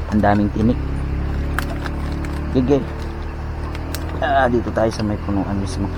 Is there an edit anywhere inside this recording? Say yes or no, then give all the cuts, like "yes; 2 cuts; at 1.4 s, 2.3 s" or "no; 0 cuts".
no; 0 cuts